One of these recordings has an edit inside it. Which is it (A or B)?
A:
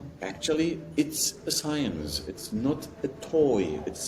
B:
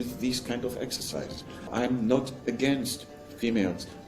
B